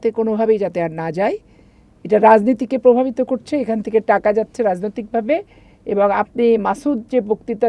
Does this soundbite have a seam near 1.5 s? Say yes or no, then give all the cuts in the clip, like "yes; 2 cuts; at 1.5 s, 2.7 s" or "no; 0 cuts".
no; 0 cuts